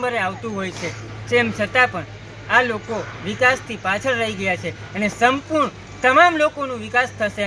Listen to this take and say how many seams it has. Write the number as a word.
zero